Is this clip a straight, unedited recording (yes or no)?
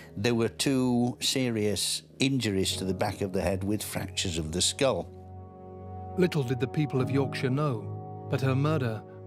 yes